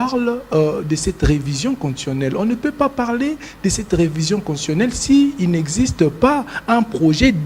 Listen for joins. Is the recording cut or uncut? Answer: uncut